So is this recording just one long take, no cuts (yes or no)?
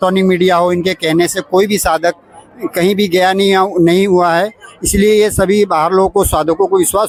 yes